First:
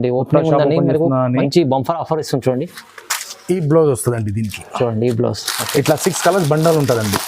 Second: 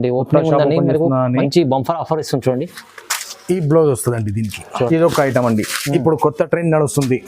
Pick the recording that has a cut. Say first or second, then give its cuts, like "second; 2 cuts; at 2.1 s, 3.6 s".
second; 1 cut; at 4.9 s